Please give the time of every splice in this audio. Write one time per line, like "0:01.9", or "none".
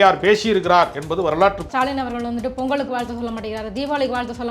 0:01.7